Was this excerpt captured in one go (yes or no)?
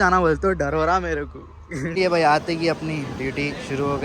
no